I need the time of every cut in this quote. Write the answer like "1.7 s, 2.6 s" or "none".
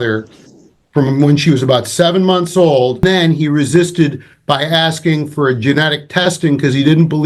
3.0 s